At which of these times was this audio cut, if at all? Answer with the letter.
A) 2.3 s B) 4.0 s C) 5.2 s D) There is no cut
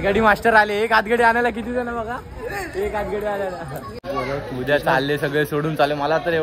B